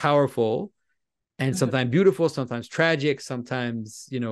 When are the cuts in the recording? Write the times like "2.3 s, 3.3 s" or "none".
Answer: none